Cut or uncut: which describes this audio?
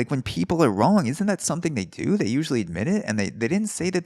uncut